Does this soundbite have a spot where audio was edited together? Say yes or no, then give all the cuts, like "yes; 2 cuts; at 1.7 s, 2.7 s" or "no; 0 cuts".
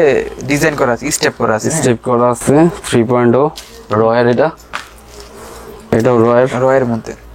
no; 0 cuts